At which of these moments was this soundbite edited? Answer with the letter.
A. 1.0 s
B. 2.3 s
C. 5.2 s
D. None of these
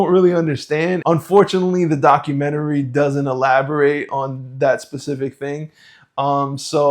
A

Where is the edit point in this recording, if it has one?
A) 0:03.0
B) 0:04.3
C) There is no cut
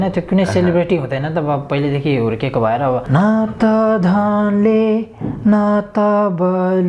A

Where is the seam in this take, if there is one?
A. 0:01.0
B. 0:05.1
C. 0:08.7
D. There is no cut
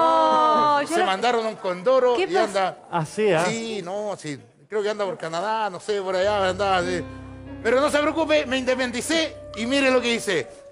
B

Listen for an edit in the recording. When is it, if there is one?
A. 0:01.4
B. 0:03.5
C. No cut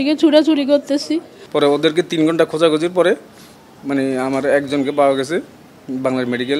A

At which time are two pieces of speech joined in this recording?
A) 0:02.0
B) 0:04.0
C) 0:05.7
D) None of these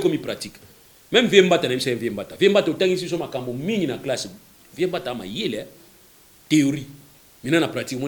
D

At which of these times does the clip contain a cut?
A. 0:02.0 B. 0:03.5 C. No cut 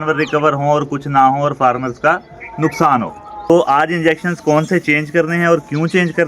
B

